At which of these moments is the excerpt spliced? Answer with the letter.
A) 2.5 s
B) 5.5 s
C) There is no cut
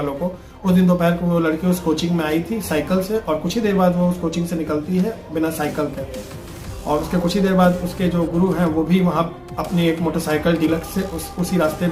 C